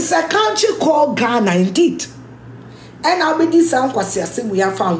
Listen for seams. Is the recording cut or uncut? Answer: uncut